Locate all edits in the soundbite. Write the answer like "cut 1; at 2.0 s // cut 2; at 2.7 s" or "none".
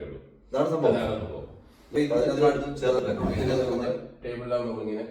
cut 1; at 2.5 s